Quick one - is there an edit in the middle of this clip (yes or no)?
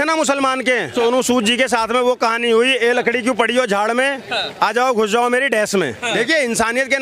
yes